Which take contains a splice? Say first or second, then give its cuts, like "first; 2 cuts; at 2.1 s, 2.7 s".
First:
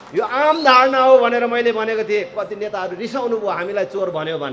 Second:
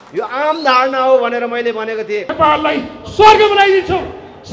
second; 1 cut; at 2.3 s